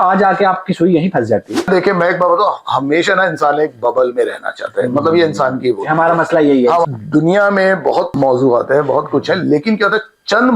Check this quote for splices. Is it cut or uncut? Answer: cut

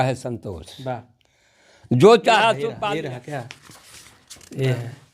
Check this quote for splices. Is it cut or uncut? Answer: cut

